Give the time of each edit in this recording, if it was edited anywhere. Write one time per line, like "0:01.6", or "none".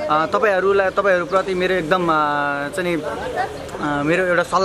none